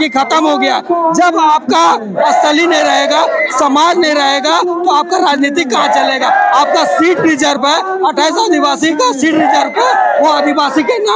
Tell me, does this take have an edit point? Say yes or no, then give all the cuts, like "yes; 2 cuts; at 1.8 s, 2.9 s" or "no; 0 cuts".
no; 0 cuts